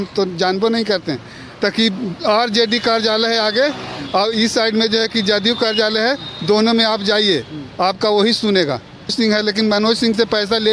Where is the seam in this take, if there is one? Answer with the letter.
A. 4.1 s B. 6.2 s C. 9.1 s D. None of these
C